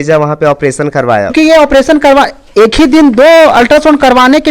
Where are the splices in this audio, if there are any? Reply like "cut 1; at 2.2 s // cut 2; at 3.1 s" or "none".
cut 1; at 1.3 s